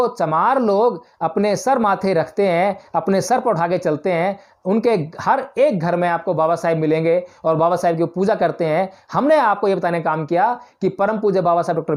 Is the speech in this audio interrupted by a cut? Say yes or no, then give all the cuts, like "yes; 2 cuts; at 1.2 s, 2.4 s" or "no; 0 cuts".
no; 0 cuts